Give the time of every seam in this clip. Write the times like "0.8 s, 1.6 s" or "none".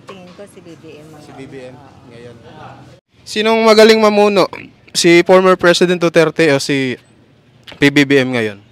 2.9 s